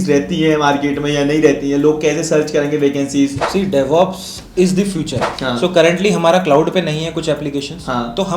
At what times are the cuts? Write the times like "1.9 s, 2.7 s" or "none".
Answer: 3.4 s, 5.3 s